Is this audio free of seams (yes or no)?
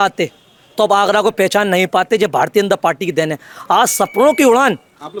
yes